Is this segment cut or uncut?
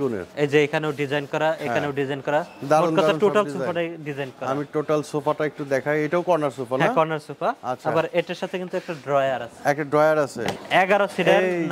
cut